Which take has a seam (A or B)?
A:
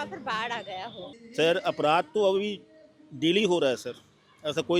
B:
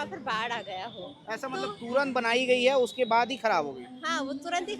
A